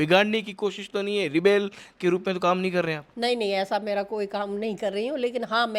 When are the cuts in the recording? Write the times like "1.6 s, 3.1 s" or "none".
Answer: none